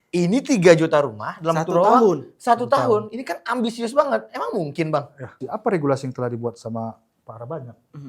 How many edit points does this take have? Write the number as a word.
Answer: one